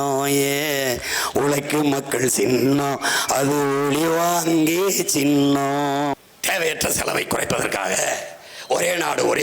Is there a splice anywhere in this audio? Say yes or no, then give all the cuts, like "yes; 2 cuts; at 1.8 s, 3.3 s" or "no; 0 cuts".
yes; 1 cut; at 6.3 s